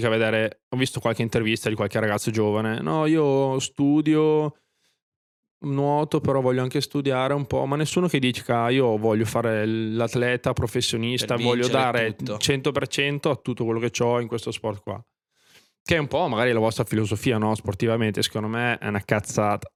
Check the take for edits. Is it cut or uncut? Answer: uncut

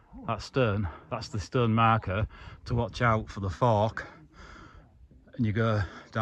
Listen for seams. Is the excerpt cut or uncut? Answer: uncut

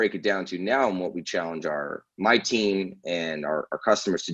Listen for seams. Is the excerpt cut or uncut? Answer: uncut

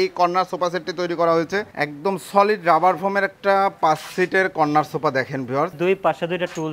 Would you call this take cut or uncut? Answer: cut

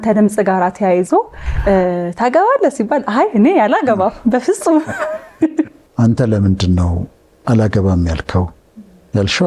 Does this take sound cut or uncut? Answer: cut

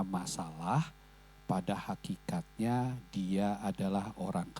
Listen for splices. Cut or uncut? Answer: uncut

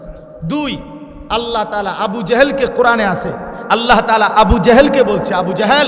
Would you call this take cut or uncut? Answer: cut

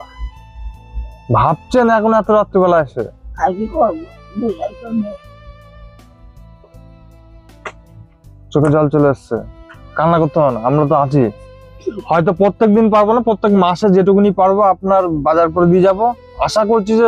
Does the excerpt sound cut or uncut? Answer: uncut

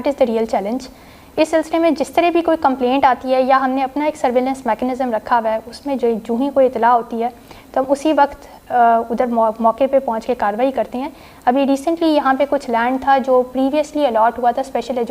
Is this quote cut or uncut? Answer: uncut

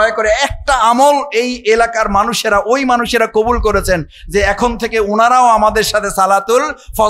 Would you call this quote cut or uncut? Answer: uncut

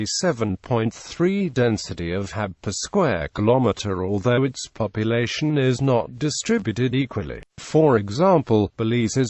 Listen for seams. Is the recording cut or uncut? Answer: uncut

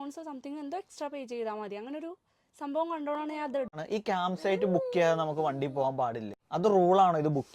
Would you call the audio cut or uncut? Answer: cut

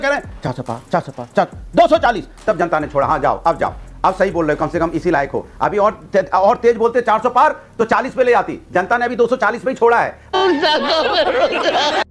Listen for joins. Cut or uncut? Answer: uncut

